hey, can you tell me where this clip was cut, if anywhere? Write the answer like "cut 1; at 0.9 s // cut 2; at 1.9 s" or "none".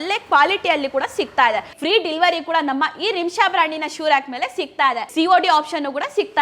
cut 1; at 1.7 s // cut 2; at 5.0 s